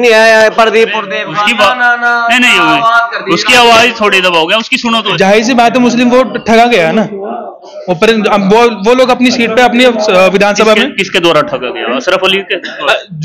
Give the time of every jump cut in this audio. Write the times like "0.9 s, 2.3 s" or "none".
5.1 s